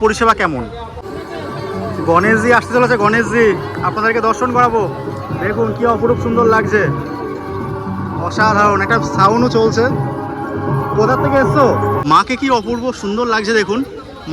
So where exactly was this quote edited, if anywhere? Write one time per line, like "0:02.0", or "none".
0:00.9
0:12.0